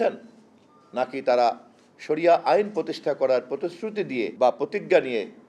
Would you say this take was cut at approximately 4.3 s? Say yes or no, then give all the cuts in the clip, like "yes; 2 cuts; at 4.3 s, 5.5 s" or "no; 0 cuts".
yes; 1 cut; at 4.3 s